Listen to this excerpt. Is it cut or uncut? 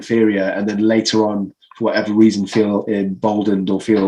uncut